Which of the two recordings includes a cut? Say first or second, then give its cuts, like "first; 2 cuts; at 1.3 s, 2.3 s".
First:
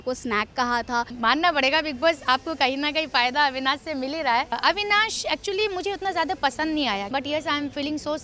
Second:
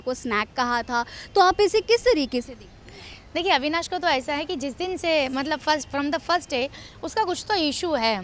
first; 3 cuts; at 1.1 s, 4.6 s, 7.1 s